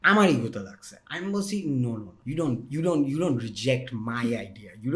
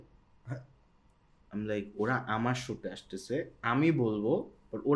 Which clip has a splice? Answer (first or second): first